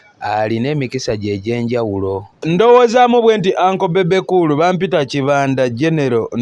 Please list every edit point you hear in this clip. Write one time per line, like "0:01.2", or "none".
0:02.4